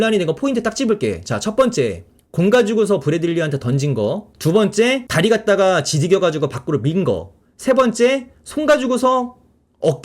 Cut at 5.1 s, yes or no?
yes